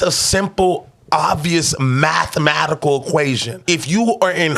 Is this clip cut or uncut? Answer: cut